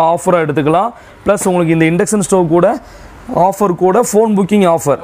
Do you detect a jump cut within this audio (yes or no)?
no